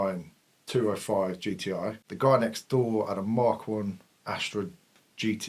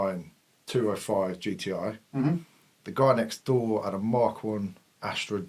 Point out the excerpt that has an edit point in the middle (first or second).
first